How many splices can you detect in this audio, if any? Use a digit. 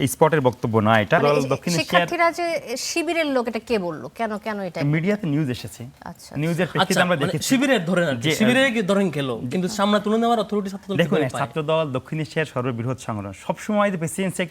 1